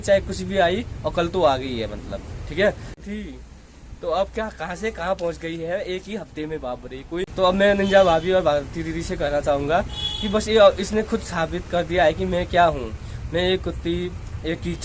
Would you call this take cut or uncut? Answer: cut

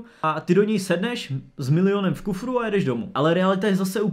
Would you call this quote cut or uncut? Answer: cut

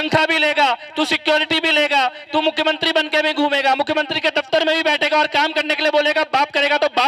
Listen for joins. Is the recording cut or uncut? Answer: uncut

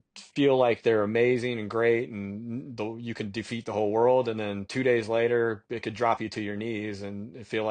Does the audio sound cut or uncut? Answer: uncut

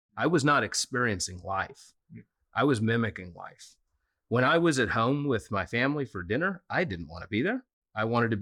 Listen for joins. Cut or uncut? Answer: uncut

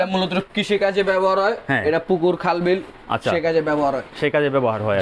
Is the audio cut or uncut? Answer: uncut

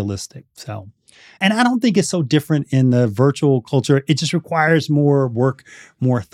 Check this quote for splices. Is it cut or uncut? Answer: cut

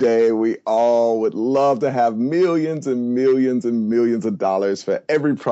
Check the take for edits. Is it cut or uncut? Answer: uncut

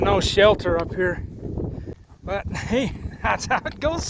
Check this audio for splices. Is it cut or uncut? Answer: cut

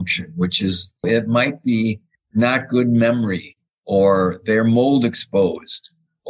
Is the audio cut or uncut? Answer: cut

